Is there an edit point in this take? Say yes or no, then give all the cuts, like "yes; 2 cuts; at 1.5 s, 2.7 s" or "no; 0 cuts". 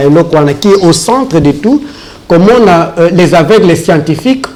no; 0 cuts